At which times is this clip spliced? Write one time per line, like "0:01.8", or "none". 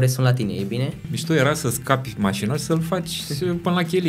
0:01.1